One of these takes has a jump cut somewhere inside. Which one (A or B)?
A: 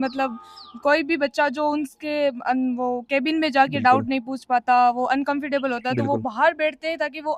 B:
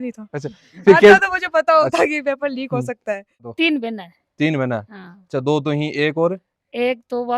B